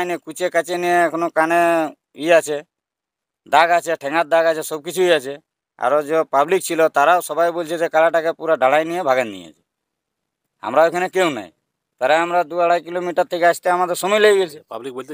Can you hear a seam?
no; 0 cuts

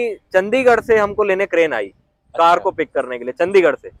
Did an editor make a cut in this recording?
no; 0 cuts

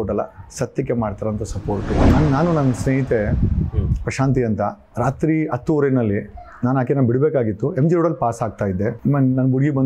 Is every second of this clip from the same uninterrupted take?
no; 2 cuts; at 2.0 s, 9.0 s

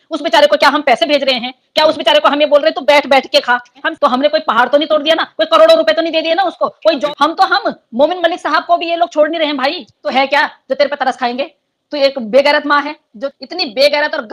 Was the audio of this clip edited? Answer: yes; 4 cuts; at 3.8 s, 7.0 s, 10.0 s, 13.2 s

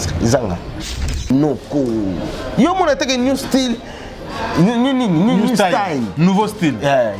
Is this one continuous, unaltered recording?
no; 1 cut; at 1.0 s

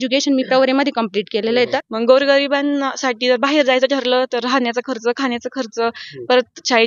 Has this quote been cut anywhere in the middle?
yes; 1 cut; at 1.8 s

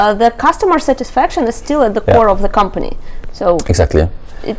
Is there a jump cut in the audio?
no; 0 cuts

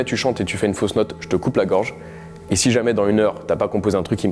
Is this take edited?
no; 0 cuts

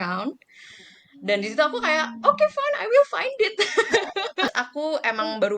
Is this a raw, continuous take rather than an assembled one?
no; 1 cut; at 4.6 s

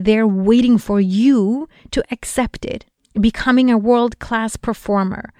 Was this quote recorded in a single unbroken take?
no; 1 cut; at 2.9 s

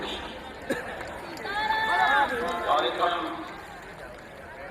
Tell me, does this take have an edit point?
yes; 1 cut; at 2.9 s

